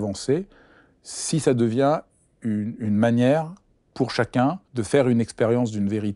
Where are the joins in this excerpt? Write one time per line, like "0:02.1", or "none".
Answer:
0:04.7